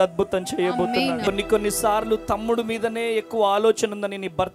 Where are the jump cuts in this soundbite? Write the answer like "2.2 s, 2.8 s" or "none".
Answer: 1.2 s